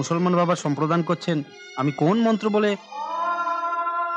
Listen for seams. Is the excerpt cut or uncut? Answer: uncut